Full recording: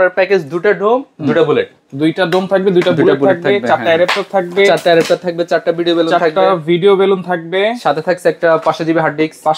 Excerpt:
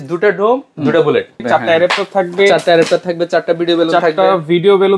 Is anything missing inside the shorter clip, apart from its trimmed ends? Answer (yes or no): yes